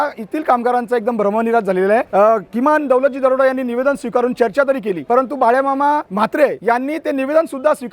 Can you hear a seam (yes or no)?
yes